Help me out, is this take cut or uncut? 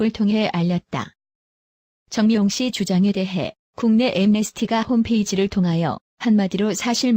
uncut